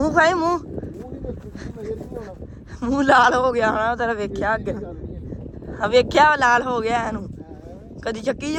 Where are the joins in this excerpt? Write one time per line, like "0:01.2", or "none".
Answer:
none